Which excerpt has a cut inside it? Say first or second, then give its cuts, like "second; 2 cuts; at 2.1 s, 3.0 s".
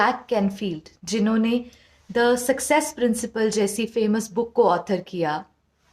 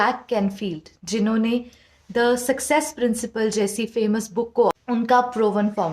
second; 1 cut; at 4.6 s